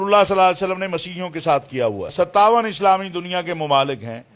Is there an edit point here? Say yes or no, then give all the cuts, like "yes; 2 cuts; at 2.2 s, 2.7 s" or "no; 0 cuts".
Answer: yes; 1 cut; at 2.1 s